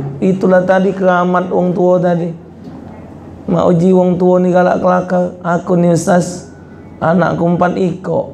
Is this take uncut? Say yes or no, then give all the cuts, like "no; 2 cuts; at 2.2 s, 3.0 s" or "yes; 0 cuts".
yes; 0 cuts